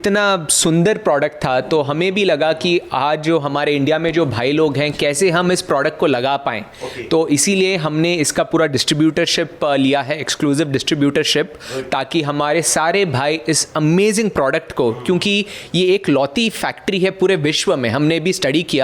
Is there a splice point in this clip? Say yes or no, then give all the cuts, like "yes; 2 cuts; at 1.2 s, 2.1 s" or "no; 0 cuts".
no; 0 cuts